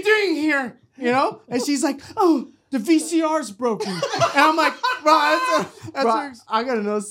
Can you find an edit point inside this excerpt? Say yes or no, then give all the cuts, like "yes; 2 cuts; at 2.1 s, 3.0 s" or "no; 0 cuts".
yes; 1 cut; at 6.0 s